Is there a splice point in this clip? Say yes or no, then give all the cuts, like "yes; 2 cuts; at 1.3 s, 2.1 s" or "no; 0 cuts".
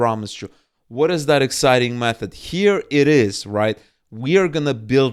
no; 0 cuts